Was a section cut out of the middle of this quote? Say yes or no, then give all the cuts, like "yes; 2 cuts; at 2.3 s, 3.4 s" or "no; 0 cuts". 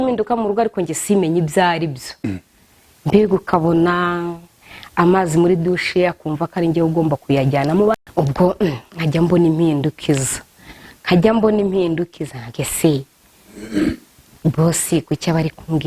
yes; 1 cut; at 7.9 s